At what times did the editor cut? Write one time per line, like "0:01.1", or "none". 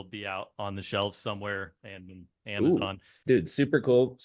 0:03.1